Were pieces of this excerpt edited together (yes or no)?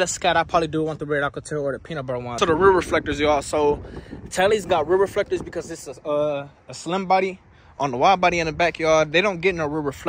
yes